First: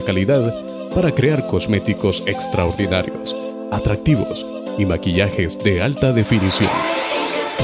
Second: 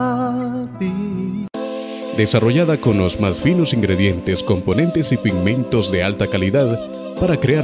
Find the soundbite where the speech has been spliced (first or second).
second